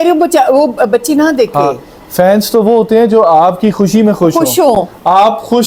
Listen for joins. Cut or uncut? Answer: uncut